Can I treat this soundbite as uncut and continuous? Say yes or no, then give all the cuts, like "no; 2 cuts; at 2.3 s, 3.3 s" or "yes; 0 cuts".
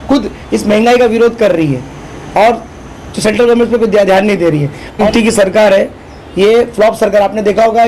no; 1 cut; at 5.1 s